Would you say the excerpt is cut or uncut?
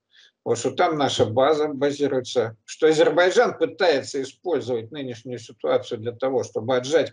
uncut